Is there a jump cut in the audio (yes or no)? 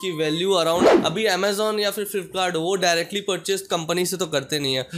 yes